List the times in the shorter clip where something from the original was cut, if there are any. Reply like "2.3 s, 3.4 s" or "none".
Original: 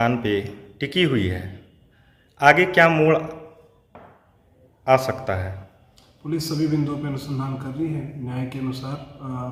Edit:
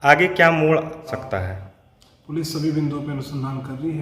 1.1 s